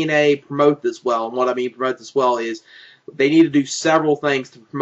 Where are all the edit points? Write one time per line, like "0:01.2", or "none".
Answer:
0:01.0